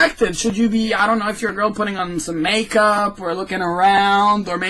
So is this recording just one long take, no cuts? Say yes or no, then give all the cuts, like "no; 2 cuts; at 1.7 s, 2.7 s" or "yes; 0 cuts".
no; 1 cut; at 2.3 s